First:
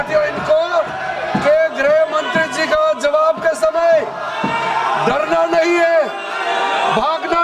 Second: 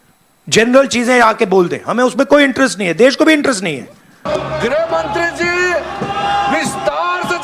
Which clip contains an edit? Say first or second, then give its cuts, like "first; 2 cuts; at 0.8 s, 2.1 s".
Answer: second; 1 cut; at 4.3 s